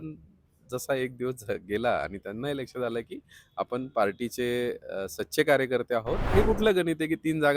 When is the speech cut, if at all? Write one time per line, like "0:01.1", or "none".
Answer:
0:06.3